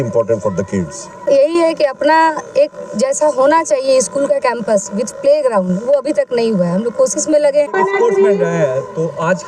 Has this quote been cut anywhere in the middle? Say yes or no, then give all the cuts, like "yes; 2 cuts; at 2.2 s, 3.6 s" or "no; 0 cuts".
yes; 2 cuts; at 1.2 s, 7.7 s